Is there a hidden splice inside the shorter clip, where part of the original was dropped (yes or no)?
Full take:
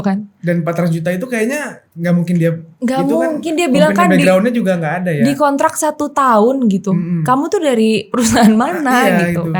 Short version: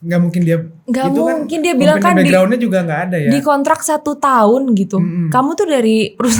no